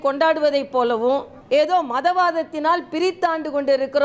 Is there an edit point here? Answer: yes; 1 cut; at 1.3 s

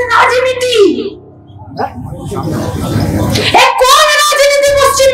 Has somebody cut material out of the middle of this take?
no; 0 cuts

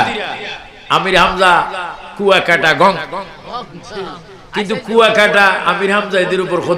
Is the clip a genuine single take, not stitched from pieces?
yes; 0 cuts

